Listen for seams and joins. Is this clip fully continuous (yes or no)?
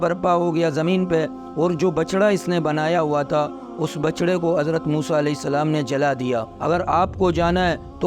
no